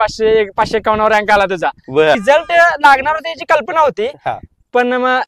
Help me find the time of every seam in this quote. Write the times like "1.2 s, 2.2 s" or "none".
2.2 s